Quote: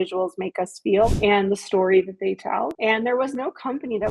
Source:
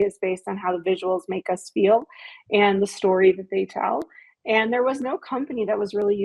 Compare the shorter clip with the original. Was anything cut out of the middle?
yes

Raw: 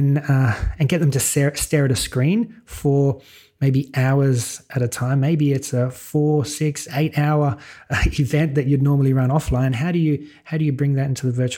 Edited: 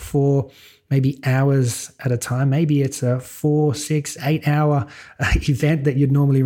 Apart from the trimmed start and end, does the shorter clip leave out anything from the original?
no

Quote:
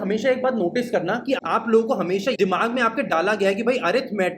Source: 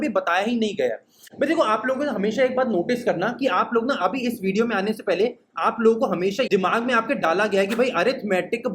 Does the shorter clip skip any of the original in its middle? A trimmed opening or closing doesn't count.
yes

